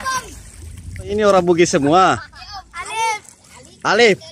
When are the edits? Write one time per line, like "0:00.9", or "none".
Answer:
0:01.1
0:02.8